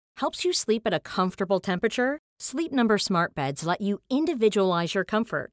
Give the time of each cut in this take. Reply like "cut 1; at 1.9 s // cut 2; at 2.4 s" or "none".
none